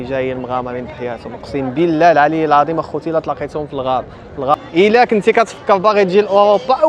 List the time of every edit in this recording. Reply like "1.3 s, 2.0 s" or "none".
4.5 s